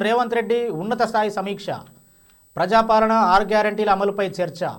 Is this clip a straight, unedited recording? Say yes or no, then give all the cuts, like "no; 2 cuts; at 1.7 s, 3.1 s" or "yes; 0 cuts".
yes; 0 cuts